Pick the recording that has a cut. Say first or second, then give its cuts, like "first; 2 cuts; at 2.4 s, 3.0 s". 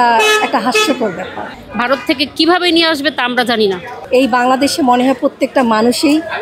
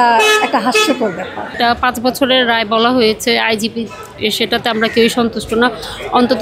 first; 2 cuts; at 1.5 s, 3.9 s